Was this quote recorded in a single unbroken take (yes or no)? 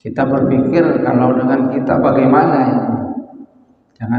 yes